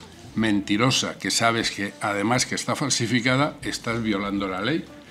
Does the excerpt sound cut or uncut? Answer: uncut